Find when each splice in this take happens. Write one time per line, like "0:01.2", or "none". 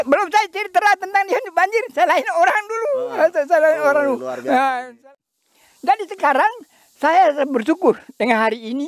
0:05.1